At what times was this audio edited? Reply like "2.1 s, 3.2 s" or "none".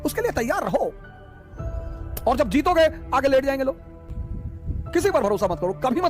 3.9 s